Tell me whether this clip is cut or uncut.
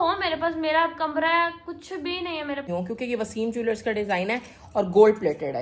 cut